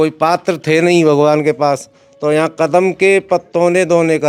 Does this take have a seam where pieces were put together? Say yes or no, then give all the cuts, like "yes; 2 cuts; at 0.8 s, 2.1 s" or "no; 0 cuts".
no; 0 cuts